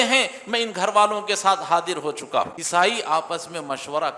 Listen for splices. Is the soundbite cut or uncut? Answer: cut